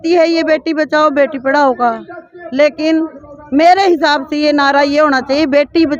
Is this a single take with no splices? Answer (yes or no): yes